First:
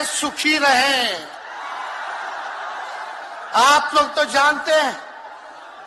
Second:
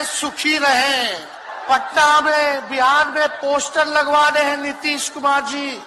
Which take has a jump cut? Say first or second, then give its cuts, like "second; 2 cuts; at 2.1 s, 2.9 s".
second; 1 cut; at 1.5 s